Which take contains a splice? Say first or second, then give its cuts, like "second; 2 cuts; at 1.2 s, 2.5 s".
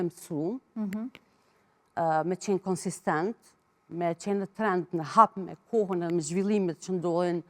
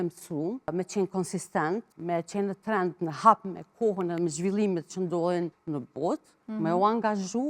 second; 3 cuts; at 0.7 s, 1.9 s, 5.9 s